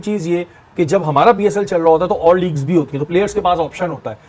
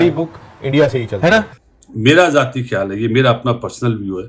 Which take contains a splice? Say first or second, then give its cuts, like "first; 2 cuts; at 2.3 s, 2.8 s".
second; 1 cut; at 1.5 s